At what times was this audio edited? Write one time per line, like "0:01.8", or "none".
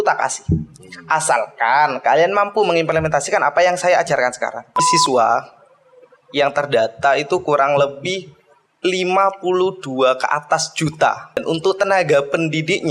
0:04.8
0:11.4

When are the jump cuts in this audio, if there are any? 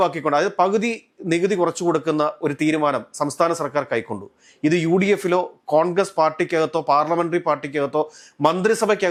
none

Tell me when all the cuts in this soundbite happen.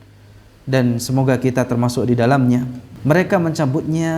0:02.8

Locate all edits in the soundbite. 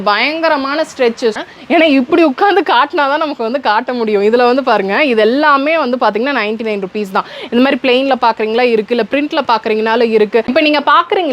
0:01.4
0:10.5

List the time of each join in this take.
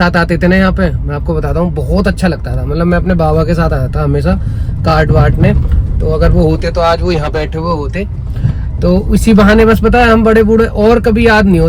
none

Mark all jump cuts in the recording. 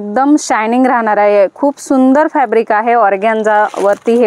none

